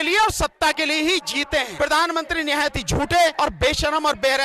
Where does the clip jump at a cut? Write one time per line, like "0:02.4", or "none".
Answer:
0:01.7
0:03.3